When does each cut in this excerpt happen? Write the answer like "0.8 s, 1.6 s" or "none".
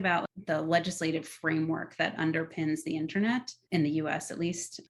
3.6 s